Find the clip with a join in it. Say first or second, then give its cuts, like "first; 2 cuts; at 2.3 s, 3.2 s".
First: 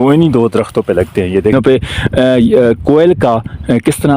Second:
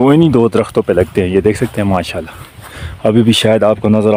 first; 1 cut; at 1.5 s